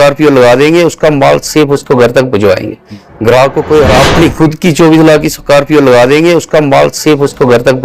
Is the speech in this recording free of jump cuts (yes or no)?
no